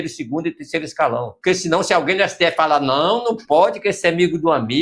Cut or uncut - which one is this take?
cut